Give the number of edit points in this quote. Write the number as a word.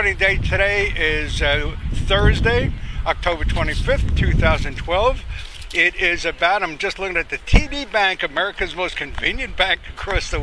zero